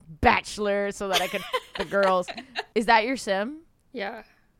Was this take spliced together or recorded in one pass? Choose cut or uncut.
uncut